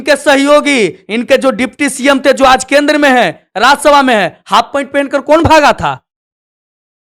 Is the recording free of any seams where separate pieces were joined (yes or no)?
yes